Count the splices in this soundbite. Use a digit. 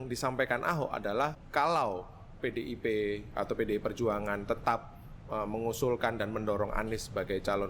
1